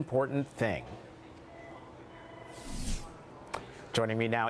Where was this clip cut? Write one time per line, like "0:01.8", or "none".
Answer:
0:01.1